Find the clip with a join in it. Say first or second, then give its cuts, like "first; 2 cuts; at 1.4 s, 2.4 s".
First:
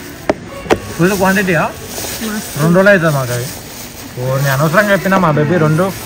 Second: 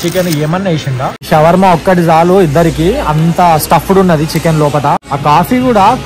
second; 2 cuts; at 1.3 s, 5.0 s